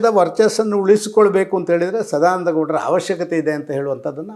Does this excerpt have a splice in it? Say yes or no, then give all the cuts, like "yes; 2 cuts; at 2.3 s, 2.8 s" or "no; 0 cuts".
no; 0 cuts